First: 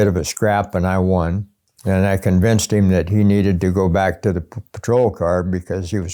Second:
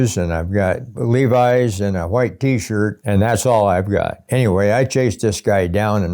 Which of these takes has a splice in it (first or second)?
second